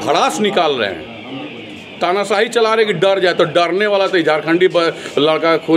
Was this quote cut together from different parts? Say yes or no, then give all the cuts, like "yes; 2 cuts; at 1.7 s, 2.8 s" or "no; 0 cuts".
no; 0 cuts